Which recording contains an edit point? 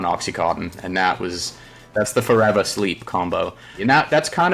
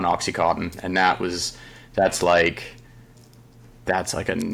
first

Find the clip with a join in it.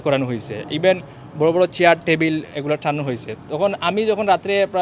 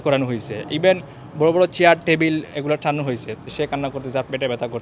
second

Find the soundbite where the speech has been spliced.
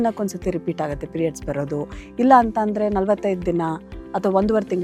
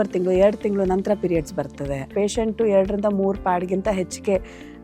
second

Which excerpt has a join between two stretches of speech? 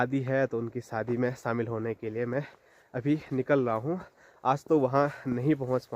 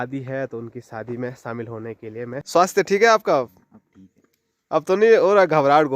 second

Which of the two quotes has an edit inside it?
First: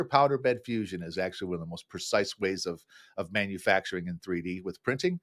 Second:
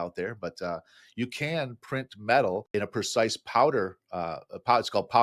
second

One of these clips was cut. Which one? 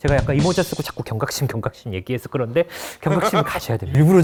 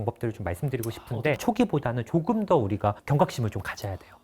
second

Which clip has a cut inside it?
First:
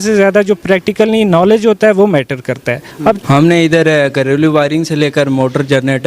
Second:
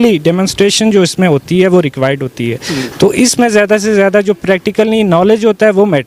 first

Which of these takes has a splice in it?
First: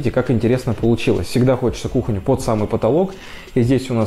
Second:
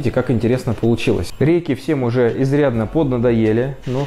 second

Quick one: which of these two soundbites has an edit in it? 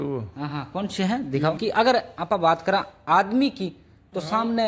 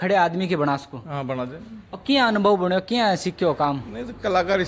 first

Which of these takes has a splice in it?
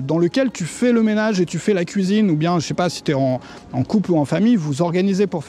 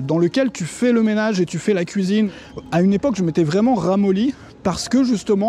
second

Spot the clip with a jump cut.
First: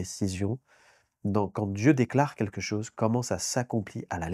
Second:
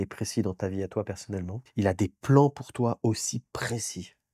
second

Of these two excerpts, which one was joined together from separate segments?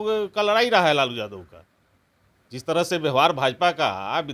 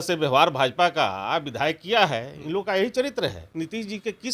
second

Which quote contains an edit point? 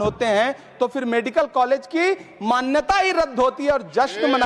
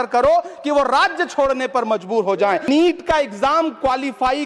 second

